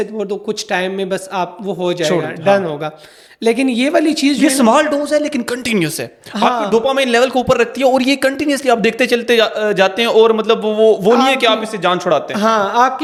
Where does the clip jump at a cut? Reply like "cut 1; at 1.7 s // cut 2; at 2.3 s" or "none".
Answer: none